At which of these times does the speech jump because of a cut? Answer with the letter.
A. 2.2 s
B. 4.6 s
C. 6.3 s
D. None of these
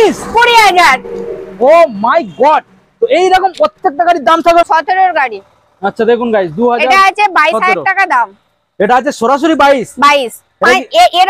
B